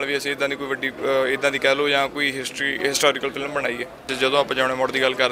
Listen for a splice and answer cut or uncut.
cut